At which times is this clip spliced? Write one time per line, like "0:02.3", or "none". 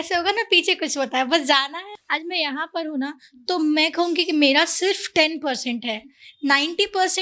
0:01.9